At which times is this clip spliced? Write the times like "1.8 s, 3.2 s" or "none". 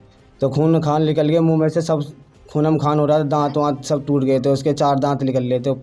none